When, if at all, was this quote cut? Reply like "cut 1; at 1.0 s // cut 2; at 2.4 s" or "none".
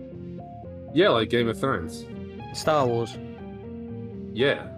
none